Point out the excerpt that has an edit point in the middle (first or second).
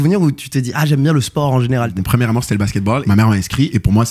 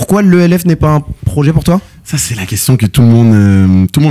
first